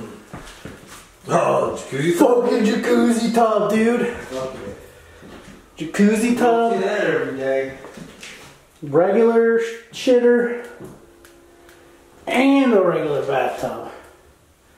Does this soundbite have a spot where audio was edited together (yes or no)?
no